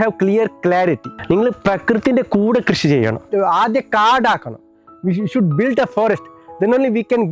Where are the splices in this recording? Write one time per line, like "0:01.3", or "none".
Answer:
0:01.1
0:03.2